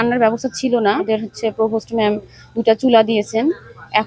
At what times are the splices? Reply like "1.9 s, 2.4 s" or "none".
1.0 s